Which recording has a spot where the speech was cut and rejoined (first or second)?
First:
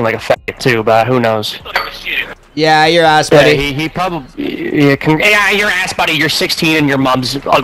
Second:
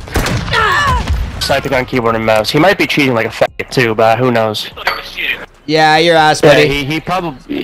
second